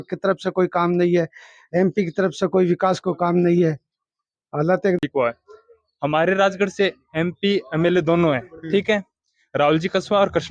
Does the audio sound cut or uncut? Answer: cut